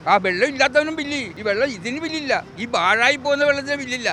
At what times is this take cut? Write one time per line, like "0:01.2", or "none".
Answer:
0:01.3
0:02.5